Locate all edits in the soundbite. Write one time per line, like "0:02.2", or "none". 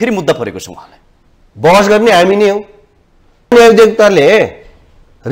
0:03.5